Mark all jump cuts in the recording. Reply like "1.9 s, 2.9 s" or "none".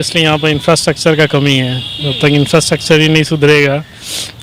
none